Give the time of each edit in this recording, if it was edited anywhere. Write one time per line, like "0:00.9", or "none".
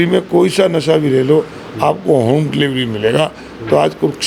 none